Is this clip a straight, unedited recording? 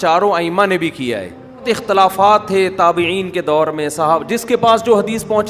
no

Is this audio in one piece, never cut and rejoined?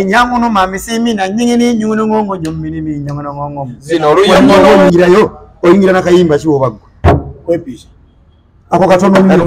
no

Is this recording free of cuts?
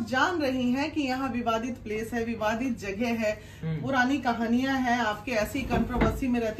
yes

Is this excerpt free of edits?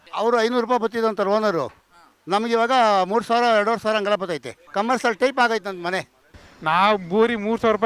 no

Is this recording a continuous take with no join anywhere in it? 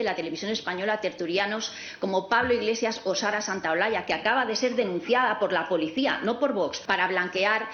no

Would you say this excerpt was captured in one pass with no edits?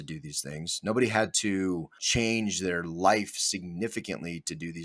no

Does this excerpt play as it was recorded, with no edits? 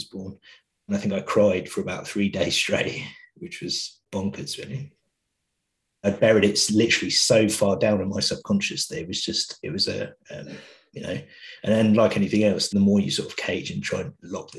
no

